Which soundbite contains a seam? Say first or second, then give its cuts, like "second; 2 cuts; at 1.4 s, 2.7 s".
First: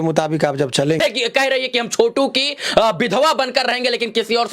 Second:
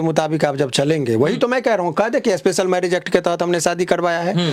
first; 1 cut; at 1.0 s